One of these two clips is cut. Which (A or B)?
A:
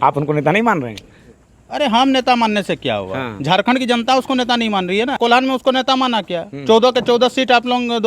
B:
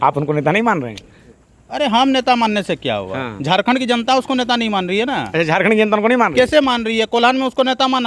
A